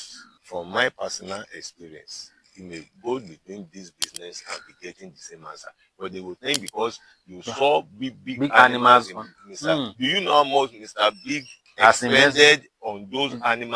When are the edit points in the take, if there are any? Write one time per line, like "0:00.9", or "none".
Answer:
none